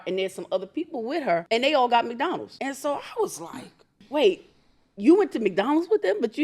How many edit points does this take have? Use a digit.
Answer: 3